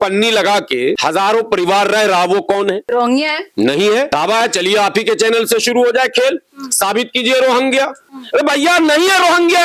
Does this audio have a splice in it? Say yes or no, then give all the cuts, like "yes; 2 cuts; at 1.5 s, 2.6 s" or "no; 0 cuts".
yes; 4 cuts; at 1.0 s, 2.8 s, 4.1 s, 8.1 s